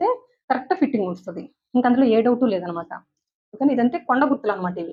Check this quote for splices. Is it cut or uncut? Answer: uncut